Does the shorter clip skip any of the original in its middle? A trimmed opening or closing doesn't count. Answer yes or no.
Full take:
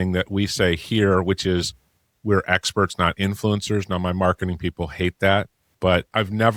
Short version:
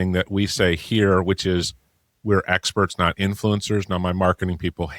no